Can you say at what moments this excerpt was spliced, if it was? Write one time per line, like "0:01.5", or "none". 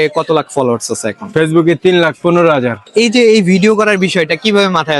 0:02.8